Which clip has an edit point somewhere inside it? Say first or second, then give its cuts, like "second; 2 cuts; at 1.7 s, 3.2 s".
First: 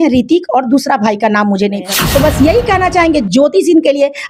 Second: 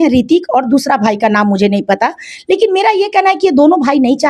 first; 1 cut; at 1.8 s